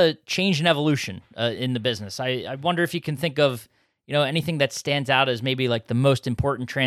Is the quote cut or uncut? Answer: uncut